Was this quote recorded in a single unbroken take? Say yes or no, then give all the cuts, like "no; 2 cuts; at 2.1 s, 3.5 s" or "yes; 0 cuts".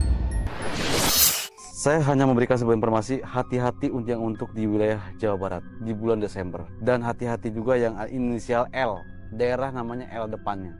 no; 1 cut; at 1.4 s